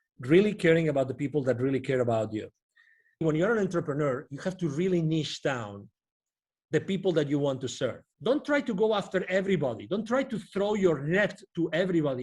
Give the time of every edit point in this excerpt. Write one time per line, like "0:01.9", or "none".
0:03.2
0:08.1